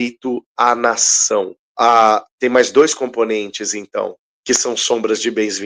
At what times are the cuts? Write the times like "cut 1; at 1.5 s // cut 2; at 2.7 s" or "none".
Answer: cut 1; at 1.6 s // cut 2; at 4.3 s